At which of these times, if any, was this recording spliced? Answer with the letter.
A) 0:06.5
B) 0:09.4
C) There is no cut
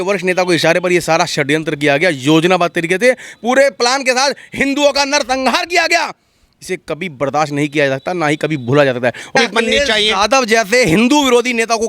B